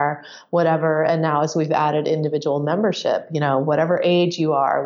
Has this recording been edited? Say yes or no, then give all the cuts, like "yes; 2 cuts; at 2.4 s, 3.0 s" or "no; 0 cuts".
no; 0 cuts